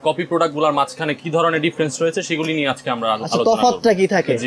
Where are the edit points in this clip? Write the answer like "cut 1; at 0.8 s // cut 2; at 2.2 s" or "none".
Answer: none

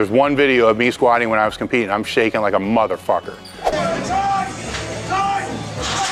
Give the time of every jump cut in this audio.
none

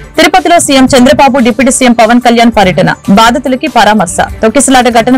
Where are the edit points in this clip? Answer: none

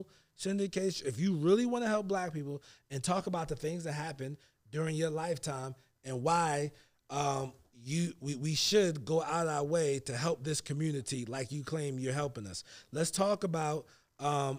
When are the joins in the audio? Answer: none

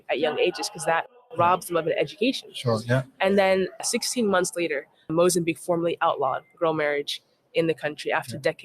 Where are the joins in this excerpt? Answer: cut 1; at 3.8 s // cut 2; at 4.9 s

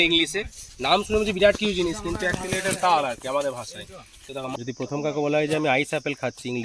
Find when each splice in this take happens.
cut 1; at 4.5 s

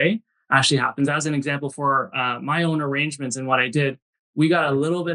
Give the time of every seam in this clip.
none

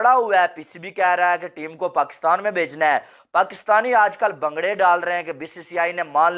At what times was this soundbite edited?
none

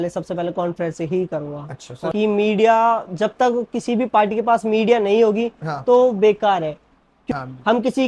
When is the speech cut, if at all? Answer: cut 1; at 2.1 s // cut 2; at 7.3 s

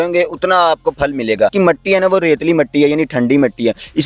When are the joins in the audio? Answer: cut 1; at 1.5 s

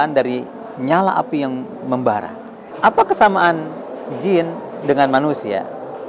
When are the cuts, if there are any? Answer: cut 1; at 2.6 s

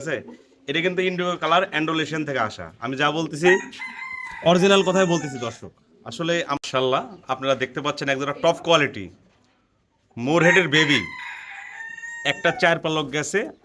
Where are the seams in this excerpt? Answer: cut 1; at 6.6 s

